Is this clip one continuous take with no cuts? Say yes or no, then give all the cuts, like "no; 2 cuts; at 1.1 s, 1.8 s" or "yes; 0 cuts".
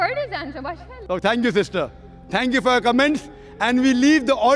no; 1 cut; at 0.9 s